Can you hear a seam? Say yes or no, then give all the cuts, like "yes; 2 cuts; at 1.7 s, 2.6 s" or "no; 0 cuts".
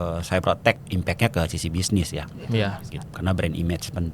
yes; 2 cuts; at 0.8 s, 3.0 s